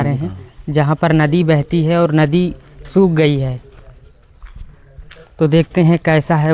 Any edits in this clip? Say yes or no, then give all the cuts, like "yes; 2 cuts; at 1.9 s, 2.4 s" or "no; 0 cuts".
no; 0 cuts